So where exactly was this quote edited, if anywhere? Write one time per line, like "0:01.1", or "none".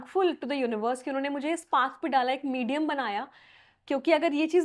none